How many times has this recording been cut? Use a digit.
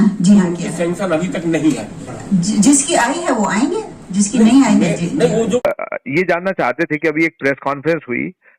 1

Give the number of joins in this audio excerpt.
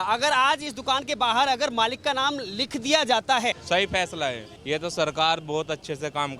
2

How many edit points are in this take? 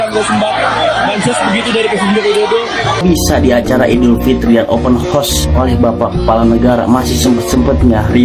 1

